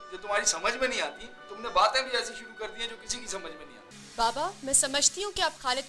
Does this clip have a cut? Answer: yes; 1 cut; at 3.9 s

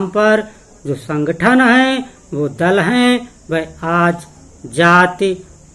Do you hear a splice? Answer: no; 0 cuts

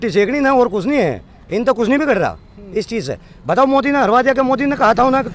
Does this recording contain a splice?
no; 0 cuts

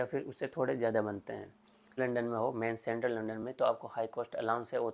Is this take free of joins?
no; 1 cut; at 2.0 s

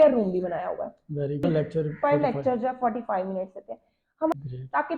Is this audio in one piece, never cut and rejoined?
no; 2 cuts; at 1.4 s, 4.3 s

